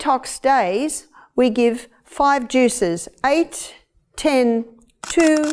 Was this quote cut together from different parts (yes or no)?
no